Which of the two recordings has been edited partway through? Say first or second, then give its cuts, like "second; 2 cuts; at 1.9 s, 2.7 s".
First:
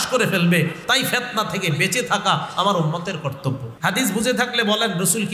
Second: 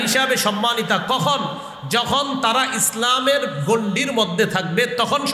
first; 1 cut; at 3.7 s